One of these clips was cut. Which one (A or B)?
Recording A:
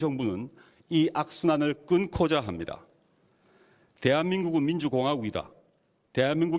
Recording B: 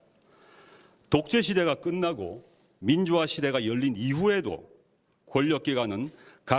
B